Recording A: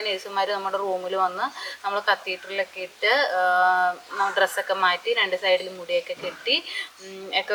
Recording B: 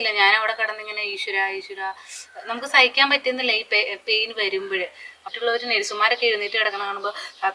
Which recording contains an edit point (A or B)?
B